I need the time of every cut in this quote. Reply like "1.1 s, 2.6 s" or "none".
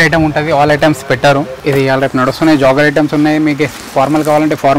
1.6 s